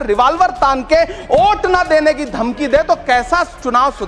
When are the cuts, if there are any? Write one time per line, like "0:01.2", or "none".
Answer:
none